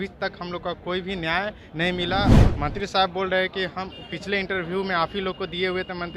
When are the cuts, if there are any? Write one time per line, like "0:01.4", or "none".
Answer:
0:02.3